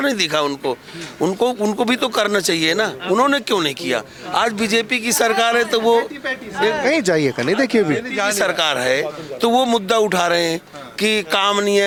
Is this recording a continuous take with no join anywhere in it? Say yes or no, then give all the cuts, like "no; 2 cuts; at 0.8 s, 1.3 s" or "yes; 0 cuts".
yes; 0 cuts